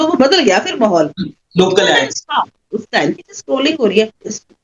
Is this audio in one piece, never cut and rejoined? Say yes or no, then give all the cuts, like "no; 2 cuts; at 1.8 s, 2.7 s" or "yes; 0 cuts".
no; 1 cut; at 3.2 s